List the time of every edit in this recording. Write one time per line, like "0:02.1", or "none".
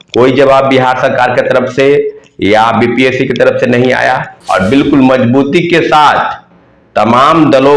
0:04.3